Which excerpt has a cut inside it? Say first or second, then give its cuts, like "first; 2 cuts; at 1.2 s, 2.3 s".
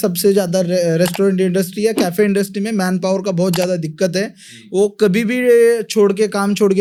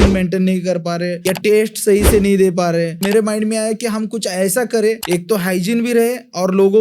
second; 3 cuts; at 1.2 s, 3.0 s, 5.0 s